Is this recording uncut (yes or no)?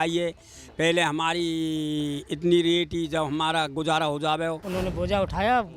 no